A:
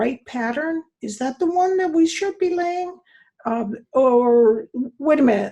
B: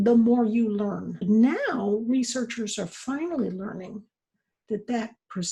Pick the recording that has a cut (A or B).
B